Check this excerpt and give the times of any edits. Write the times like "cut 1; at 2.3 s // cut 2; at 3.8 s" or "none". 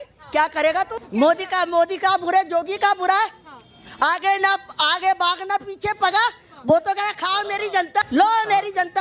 cut 1; at 1.0 s // cut 2; at 8.1 s

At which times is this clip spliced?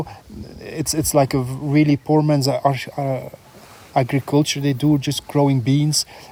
none

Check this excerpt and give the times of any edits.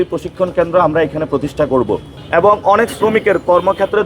cut 1; at 2.1 s

